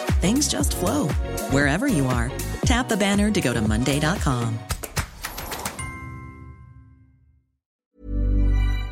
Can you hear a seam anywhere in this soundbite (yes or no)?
yes